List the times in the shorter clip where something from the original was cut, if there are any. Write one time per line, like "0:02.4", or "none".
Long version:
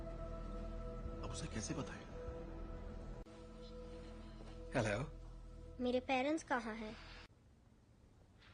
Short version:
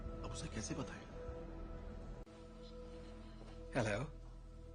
none